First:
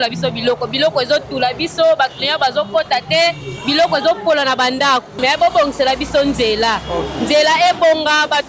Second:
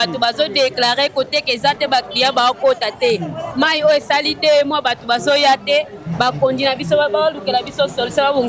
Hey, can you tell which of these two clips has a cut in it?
first; 1 cut; at 5.2 s

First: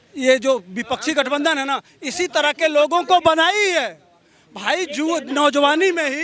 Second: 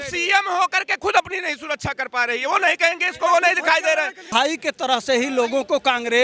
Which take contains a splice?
second; 1 cut; at 4.2 s

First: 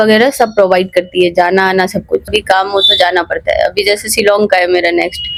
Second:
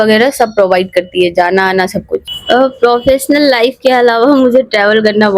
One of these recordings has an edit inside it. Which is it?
second; 1 cut; at 2.3 s

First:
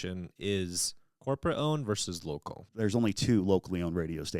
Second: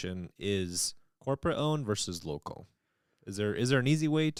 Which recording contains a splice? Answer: first; 1 cut; at 2.6 s

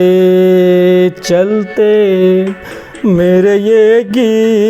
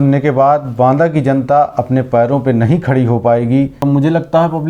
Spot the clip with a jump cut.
second; 1 cut; at 3.8 s

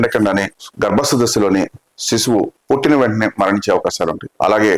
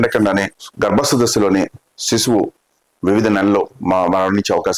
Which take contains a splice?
first; 1 cut; at 2.6 s

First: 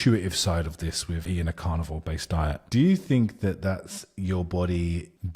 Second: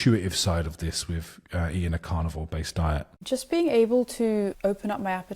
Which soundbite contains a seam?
first; 2 cuts; at 1.2 s, 2.6 s

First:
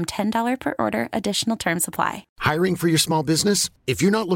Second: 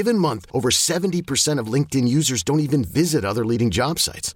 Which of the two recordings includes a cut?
first; 1 cut; at 2.3 s

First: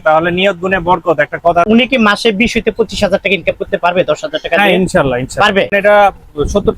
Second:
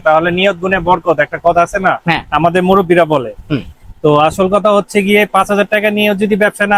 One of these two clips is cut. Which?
first; 2 cuts; at 1.7 s, 5.7 s

